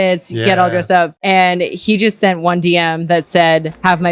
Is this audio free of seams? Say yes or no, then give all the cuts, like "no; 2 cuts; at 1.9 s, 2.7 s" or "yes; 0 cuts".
yes; 0 cuts